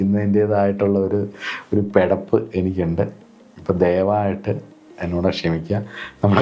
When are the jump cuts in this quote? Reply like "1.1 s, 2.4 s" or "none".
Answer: none